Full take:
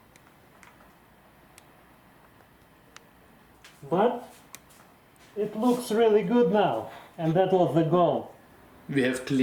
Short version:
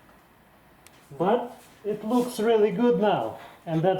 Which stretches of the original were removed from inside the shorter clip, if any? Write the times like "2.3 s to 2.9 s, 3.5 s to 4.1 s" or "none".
1.7 s to 3.7 s, 4.4 s to 5.2 s